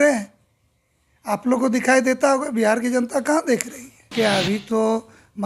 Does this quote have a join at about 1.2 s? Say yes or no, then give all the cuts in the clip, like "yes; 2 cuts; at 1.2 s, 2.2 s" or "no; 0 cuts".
no; 1 cut; at 4.1 s